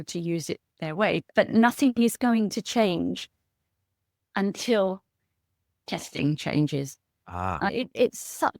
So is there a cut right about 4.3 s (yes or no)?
no